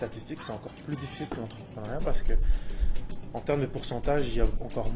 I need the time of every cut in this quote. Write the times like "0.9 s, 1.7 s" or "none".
none